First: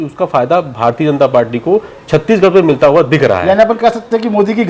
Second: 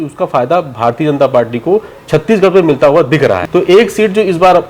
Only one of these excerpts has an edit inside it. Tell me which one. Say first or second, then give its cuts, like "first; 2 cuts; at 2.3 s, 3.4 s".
second; 1 cut; at 3.4 s